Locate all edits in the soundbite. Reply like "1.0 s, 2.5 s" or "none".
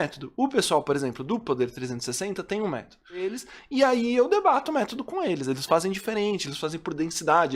3.5 s